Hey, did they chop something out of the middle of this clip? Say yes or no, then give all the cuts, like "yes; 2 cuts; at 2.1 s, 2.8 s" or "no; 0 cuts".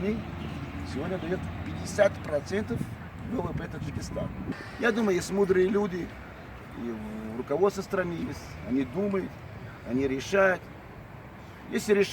yes; 1 cut; at 4.5 s